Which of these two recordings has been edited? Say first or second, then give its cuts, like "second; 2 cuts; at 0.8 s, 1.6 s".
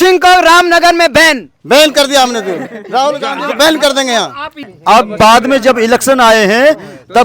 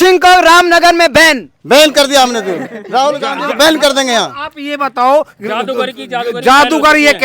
first; 1 cut; at 4.6 s